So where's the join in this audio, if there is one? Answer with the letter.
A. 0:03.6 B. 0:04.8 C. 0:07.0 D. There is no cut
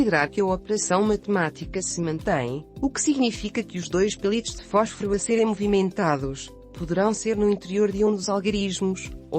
B